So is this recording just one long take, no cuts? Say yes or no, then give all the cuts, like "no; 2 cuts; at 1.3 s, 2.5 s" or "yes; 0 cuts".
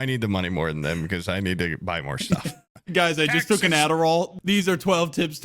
no; 2 cuts; at 2.7 s, 4.4 s